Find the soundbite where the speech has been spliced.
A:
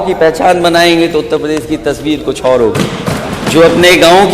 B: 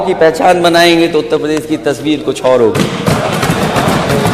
A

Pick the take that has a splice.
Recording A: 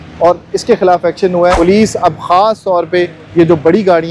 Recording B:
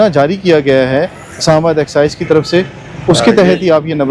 A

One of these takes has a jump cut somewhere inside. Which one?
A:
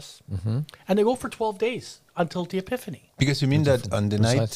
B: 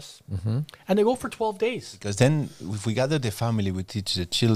B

